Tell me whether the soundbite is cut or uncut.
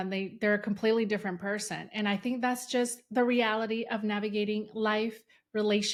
uncut